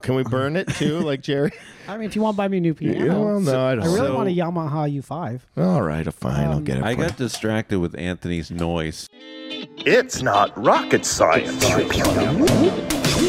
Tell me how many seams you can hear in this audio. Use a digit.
1